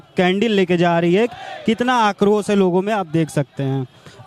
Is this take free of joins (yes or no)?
yes